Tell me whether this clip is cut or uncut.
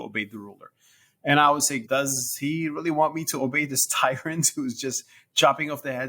cut